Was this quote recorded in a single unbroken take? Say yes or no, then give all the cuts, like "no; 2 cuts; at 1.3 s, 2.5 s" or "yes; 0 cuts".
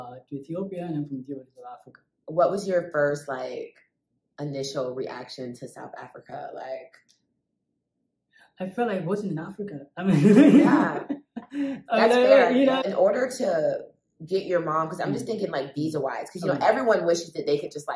no; 1 cut; at 12.9 s